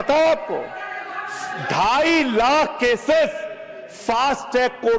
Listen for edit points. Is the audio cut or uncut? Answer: uncut